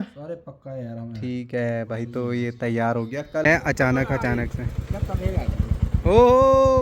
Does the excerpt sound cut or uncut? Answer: cut